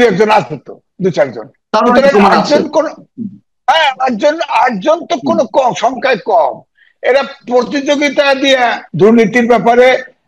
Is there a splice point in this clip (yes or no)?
yes